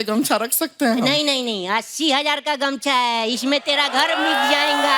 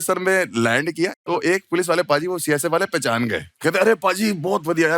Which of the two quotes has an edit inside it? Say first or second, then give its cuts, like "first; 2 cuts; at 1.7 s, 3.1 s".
second; 2 cuts; at 1.1 s, 3.5 s